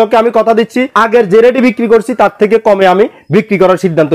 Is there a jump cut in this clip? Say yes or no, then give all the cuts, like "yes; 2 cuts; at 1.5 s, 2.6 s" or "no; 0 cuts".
yes; 1 cut; at 0.9 s